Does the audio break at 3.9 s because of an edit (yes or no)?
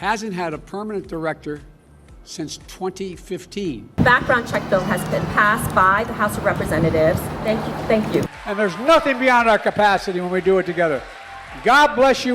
yes